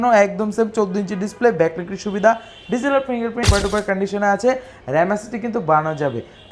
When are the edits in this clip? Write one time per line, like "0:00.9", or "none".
0:03.4

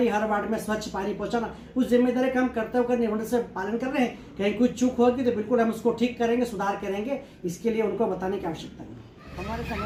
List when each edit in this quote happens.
none

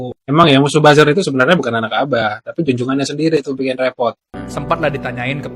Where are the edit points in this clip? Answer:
0:04.3

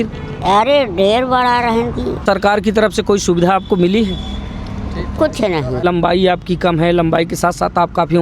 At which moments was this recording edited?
0:02.2
0:05.8

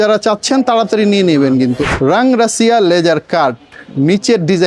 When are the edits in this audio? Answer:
0:01.8

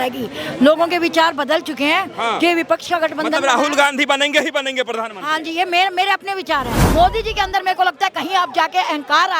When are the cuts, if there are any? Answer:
0:06.8

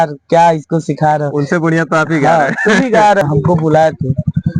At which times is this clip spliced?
0:03.2

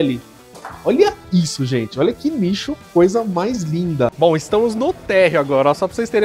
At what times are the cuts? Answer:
0:04.1

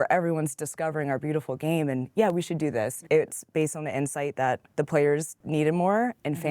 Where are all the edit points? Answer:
0:03.0
0:04.7
0:05.3

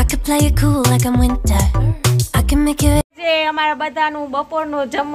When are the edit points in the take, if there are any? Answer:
0:03.0

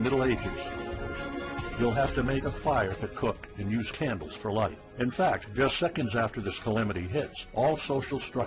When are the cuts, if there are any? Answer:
none

